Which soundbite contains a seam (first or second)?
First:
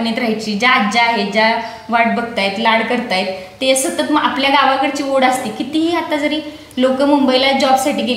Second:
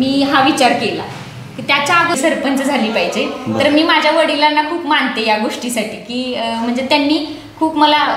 second